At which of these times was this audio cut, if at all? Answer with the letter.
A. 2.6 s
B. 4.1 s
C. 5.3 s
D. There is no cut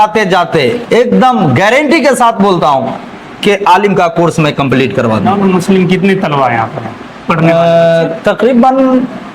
C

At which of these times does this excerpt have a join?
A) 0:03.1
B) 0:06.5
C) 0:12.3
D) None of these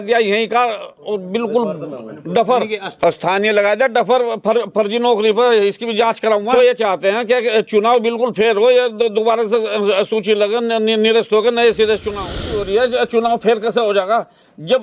C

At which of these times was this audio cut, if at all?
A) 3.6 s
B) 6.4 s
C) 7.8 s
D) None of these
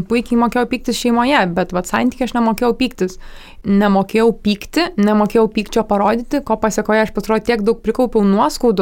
A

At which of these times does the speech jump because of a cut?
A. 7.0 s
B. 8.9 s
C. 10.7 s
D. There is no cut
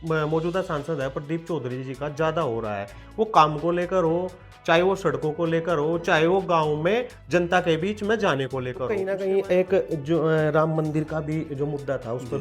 B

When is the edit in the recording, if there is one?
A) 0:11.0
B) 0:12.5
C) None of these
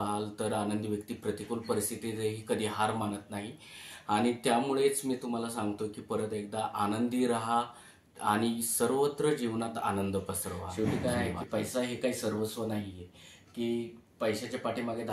A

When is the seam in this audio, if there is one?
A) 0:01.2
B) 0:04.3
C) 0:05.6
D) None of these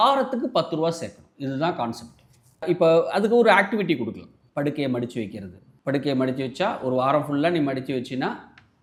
D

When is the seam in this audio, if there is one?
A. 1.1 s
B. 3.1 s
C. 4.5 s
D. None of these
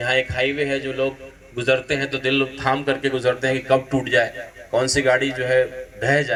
D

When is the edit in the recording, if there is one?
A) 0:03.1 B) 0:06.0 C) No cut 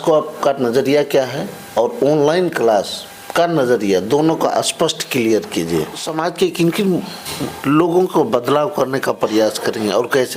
B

